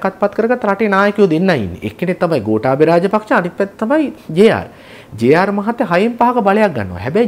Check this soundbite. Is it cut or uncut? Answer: uncut